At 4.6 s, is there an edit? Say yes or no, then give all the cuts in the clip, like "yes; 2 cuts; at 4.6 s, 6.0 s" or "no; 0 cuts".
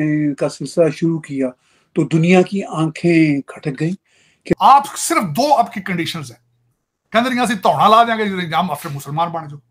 yes; 1 cut; at 4.6 s